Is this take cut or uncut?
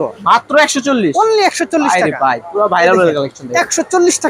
uncut